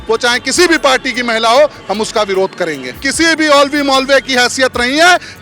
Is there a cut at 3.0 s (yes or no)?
yes